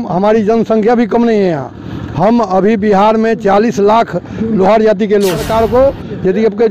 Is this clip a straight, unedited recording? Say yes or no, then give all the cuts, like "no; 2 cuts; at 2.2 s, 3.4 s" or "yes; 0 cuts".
no; 1 cut; at 5.4 s